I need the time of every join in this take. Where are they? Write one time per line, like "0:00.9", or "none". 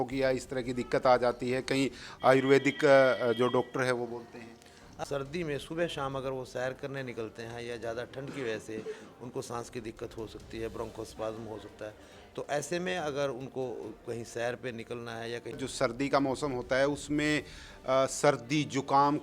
0:05.0
0:15.6